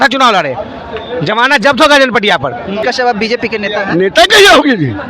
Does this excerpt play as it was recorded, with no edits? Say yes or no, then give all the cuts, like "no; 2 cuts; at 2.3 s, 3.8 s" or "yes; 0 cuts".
no; 1 cut; at 2.8 s